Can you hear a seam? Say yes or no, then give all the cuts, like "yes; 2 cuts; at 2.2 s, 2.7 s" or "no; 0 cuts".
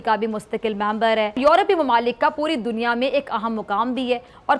yes; 1 cut; at 1.4 s